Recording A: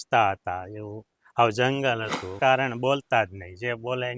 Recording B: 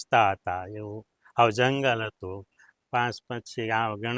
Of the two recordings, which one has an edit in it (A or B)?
A